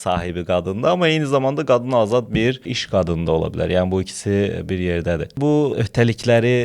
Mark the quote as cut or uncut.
uncut